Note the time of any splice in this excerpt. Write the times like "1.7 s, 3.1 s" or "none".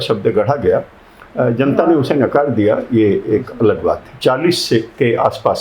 4.1 s